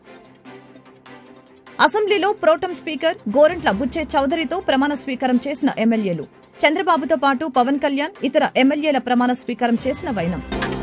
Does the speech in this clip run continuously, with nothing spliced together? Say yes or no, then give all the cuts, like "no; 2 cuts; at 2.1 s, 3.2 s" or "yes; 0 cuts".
no; 1 cut; at 1.8 s